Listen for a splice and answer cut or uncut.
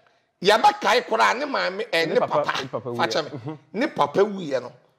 uncut